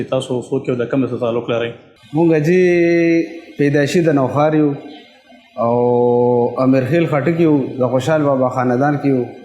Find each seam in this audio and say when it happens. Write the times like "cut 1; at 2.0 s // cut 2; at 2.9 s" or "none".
none